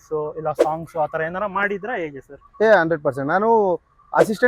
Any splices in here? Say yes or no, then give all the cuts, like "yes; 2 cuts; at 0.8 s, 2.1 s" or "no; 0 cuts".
no; 0 cuts